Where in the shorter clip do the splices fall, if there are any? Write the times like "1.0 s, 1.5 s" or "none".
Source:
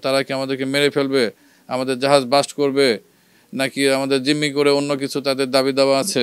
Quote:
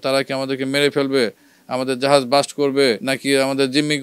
3.1 s